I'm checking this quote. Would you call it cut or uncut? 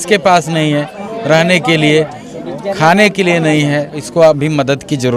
cut